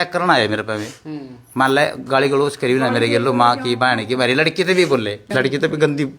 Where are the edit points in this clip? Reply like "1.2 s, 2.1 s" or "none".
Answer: 5.3 s

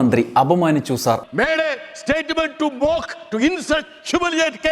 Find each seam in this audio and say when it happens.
1.2 s

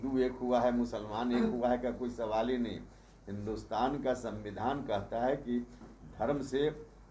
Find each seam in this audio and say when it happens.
none

